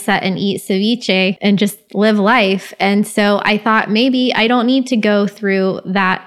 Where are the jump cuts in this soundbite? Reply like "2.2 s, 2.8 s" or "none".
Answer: 1.4 s

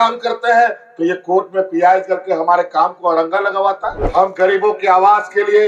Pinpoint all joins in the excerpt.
4.0 s

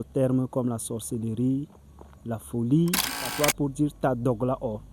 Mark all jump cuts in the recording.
3.3 s

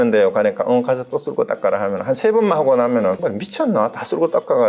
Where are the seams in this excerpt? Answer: 3.2 s

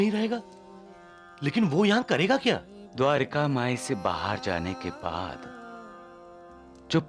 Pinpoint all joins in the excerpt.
none

